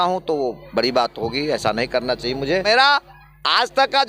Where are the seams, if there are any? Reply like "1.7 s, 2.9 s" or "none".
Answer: 2.6 s